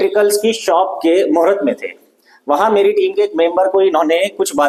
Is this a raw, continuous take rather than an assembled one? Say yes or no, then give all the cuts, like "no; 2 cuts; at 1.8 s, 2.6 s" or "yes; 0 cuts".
yes; 0 cuts